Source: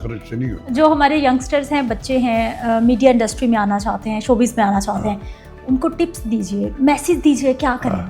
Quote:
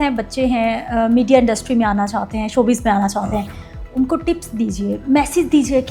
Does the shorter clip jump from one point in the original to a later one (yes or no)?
no